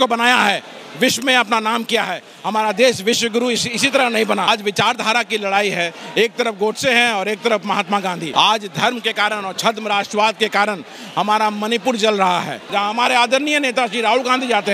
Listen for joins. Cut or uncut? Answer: cut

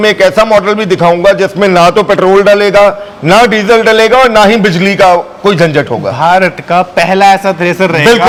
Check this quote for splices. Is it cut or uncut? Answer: uncut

